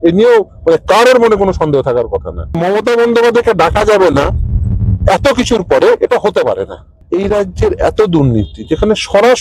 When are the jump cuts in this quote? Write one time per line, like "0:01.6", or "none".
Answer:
0:02.6
0:07.0